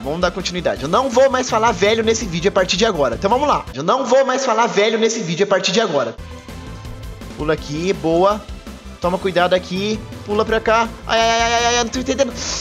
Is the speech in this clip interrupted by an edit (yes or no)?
no